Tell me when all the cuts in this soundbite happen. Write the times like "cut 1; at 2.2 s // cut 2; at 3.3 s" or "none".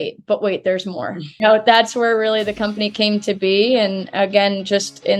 cut 1; at 1.2 s